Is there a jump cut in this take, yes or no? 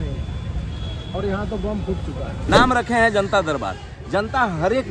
yes